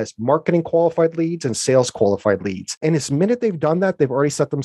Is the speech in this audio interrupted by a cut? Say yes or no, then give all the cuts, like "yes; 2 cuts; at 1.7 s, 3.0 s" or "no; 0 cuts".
yes; 1 cut; at 2.8 s